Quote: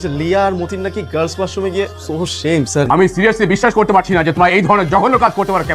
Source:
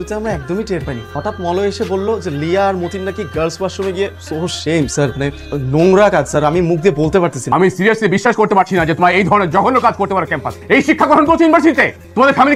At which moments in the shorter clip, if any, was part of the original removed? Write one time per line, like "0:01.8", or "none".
0:02.9